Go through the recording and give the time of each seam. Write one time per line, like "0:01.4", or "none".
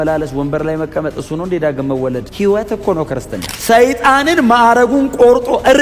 0:02.3
0:03.5